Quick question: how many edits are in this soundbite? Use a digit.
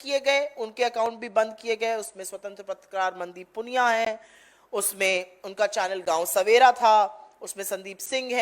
0